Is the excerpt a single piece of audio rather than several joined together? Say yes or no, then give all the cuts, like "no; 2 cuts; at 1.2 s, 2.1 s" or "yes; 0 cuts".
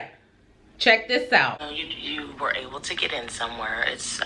no; 1 cut; at 1.6 s